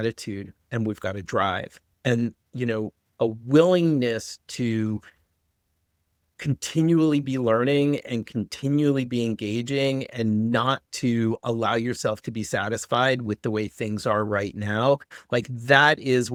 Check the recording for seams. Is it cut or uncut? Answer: uncut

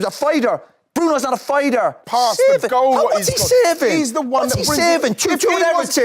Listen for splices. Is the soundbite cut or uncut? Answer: cut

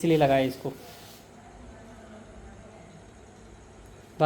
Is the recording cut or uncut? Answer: uncut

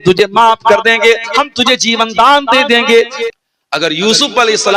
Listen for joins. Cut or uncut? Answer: cut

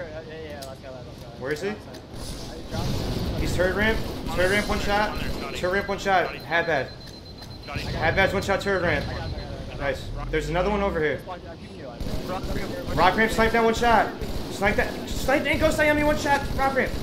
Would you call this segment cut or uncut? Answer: uncut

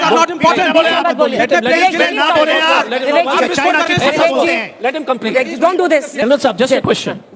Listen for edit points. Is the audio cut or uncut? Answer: cut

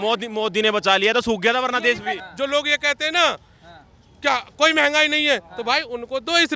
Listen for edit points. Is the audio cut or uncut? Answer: cut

